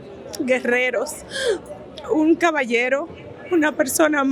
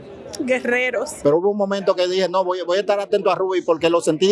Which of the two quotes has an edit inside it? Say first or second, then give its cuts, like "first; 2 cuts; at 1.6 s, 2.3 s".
second; 1 cut; at 1.1 s